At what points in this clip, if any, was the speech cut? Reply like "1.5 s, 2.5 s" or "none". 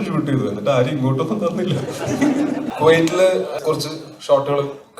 2.7 s, 3.5 s